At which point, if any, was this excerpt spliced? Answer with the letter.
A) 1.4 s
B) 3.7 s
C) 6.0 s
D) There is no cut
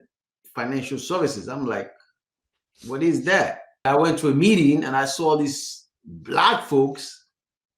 B